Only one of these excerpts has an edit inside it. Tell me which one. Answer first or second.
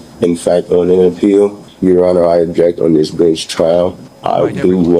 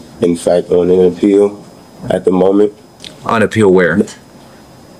first